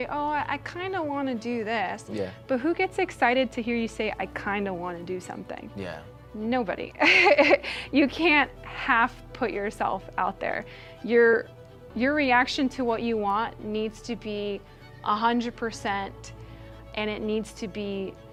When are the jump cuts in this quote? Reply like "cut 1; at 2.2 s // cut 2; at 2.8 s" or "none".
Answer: none